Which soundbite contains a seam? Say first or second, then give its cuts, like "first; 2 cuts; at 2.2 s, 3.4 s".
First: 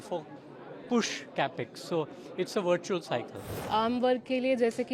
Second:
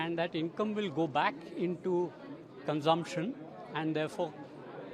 first; 1 cut; at 3.6 s